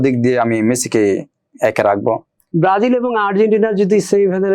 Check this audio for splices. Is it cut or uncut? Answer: cut